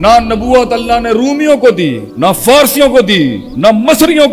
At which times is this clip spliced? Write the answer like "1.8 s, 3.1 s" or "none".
2.0 s, 3.4 s